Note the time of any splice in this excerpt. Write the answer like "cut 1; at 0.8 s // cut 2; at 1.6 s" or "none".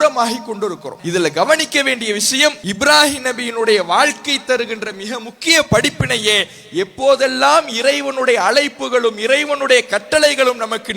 cut 1; at 0.9 s // cut 2; at 2.6 s

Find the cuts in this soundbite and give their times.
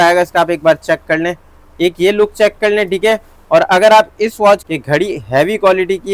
cut 1; at 4.7 s

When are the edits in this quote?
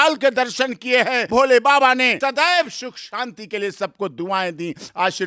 cut 1; at 1.2 s // cut 2; at 2.2 s

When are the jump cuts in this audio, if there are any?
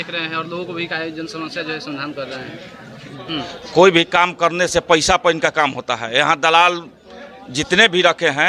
cut 1; at 3.2 s

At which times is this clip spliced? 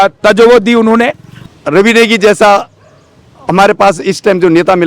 cut 1; at 1.3 s

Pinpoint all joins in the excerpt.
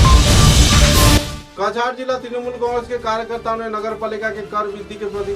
cut 1; at 1.4 s

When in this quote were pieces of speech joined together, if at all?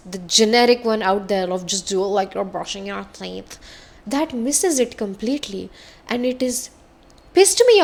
none

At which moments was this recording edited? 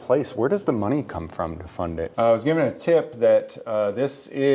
cut 1; at 2.1 s

